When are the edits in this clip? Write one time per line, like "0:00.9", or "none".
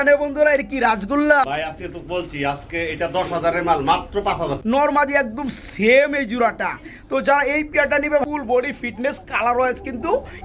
0:01.4
0:04.6
0:08.2